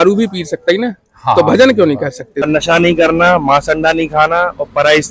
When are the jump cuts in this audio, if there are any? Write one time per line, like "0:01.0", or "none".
0:02.4